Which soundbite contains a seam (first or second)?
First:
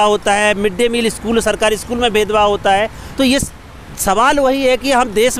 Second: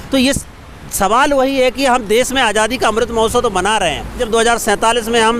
second